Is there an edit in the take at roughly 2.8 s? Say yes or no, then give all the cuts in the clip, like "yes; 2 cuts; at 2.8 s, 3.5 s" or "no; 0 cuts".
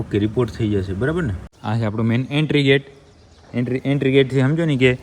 no; 1 cut; at 1.5 s